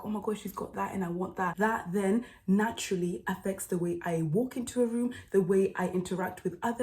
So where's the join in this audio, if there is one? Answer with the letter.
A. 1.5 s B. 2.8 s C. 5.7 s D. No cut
A